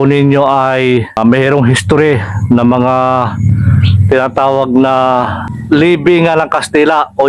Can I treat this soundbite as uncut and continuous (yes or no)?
yes